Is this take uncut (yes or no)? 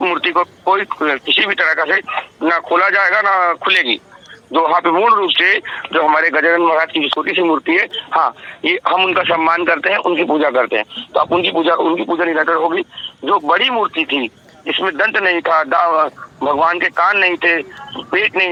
yes